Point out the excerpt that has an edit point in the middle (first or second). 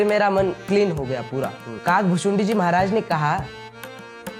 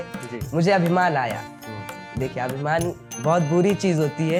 first